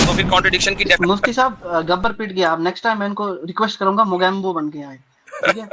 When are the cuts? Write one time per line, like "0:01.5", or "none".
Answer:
0:01.0